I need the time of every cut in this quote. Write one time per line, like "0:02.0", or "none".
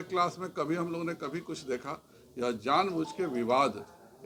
none